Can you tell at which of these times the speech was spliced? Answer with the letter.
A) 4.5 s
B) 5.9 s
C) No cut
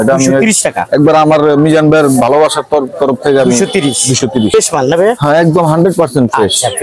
A